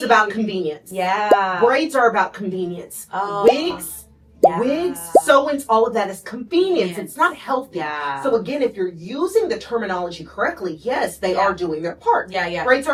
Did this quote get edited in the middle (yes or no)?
no